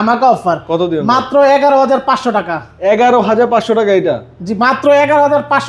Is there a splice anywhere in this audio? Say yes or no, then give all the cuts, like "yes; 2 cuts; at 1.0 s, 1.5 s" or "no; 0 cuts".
no; 0 cuts